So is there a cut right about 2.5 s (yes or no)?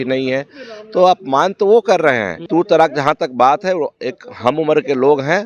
yes